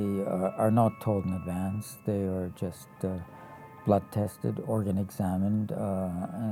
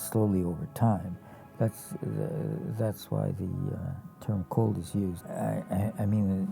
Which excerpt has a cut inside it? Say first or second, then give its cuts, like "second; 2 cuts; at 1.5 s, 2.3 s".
second; 1 cut; at 5.2 s